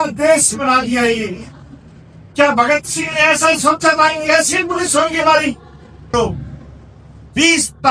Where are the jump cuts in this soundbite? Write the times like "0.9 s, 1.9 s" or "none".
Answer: 6.0 s